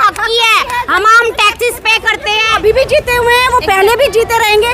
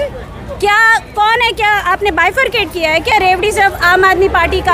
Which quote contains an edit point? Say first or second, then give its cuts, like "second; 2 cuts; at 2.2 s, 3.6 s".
first; 1 cut; at 2.5 s